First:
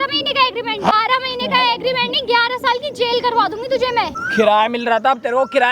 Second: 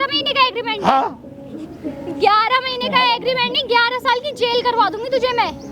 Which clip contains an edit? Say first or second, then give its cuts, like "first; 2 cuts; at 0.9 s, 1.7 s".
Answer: first; 2 cuts; at 0.9 s, 4.3 s